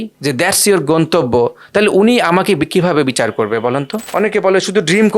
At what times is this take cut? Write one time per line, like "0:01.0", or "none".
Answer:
0:04.0